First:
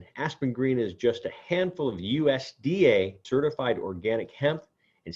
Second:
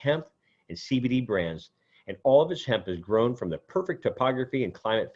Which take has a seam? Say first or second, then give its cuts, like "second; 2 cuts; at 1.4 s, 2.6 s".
first; 1 cut; at 3.2 s